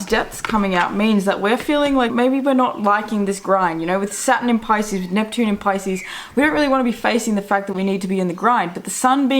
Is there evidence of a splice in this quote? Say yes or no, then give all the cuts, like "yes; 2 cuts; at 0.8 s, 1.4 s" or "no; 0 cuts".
yes; 1 cut; at 2.1 s